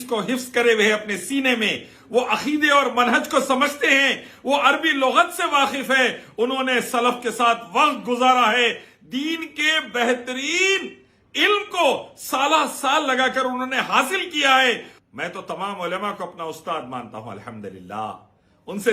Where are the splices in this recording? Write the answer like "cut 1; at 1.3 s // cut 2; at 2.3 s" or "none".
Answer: cut 1; at 14.9 s